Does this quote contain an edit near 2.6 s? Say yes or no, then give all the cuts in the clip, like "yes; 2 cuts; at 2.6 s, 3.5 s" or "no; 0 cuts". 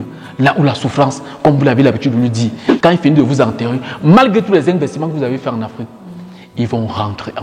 yes; 1 cut; at 2.6 s